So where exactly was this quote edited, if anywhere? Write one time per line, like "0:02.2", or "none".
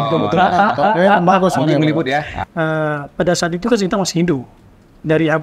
0:02.4